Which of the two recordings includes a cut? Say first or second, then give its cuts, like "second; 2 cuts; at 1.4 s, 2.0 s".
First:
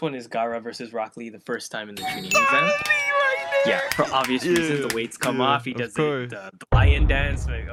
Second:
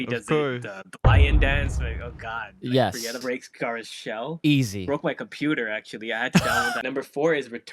second; 2 cuts; at 3.1 s, 6.8 s